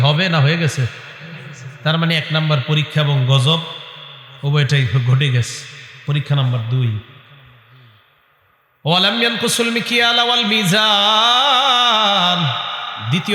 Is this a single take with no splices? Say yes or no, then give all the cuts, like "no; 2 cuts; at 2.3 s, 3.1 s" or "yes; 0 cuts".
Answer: yes; 0 cuts